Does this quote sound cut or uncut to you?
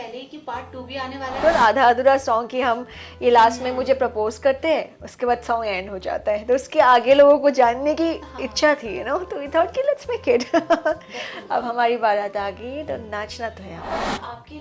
cut